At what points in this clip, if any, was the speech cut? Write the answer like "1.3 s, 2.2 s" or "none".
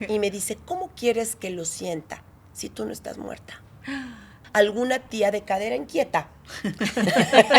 4.4 s